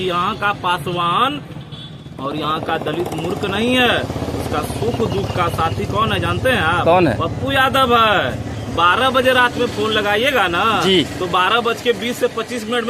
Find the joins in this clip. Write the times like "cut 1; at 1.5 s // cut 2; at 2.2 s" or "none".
none